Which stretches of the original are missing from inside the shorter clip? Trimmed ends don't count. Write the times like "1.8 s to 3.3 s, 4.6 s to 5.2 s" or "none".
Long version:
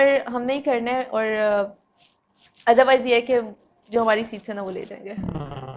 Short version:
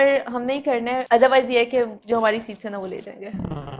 1.0 s to 2.6 s, 3.5 s to 3.8 s